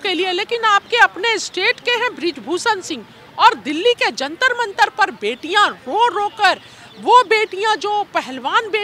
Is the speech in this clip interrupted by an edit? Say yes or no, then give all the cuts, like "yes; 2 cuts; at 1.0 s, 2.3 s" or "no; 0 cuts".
no; 0 cuts